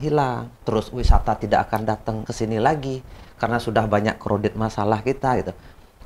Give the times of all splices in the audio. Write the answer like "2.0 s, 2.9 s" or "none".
2.3 s

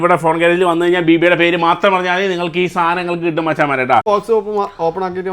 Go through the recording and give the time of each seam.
4.1 s

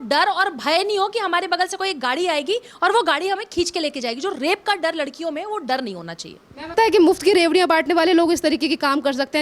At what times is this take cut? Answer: 6.7 s

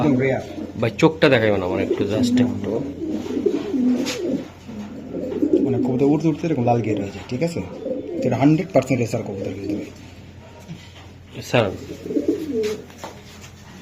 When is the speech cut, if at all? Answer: none

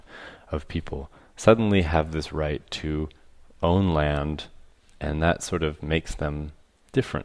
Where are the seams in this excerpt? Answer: none

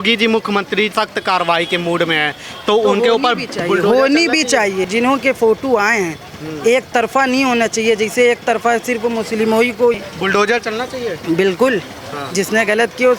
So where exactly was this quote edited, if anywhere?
0.9 s, 4.9 s, 10.0 s

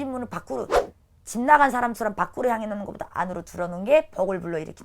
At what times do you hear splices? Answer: none

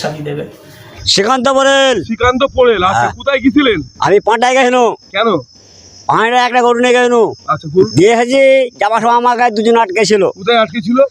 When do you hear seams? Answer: 1.0 s, 7.9 s

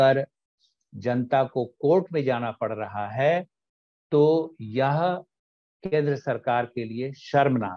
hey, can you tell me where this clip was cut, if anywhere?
none

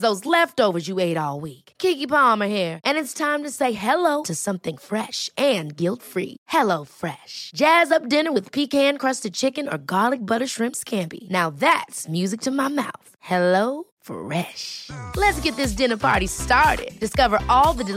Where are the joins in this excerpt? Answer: none

